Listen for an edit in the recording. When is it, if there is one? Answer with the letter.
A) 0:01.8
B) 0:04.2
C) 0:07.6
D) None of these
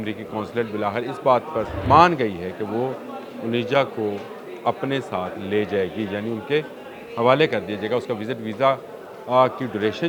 A